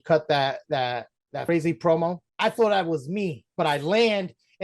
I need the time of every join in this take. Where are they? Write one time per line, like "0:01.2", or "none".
0:01.5
0:02.2
0:03.4

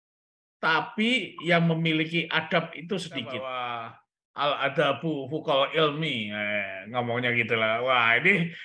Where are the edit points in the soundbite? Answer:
0:03.5

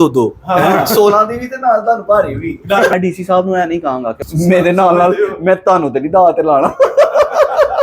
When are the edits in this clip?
0:02.9
0:04.2

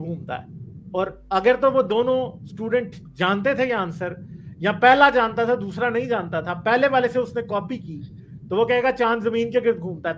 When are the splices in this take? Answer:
none

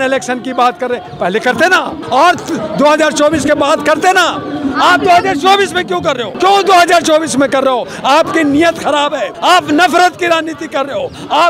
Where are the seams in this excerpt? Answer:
0:02.0
0:06.3
0:09.3

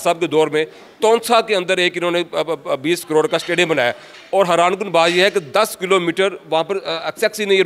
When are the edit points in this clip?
none

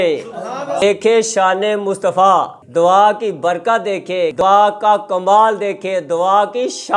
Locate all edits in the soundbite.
0:00.8
0:04.4

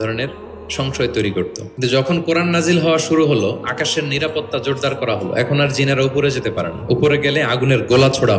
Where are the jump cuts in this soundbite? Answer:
0:01.6

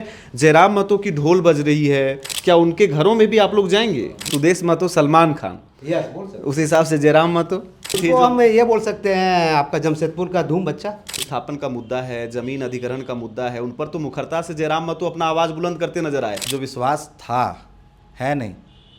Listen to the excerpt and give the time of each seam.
0:02.3
0:04.3
0:08.0
0:11.3
0:16.4

